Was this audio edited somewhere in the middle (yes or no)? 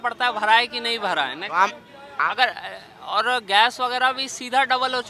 no